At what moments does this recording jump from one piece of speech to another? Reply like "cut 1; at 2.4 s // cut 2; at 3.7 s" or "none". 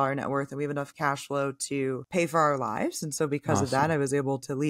none